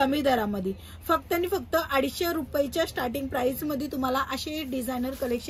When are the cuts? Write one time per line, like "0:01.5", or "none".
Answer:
none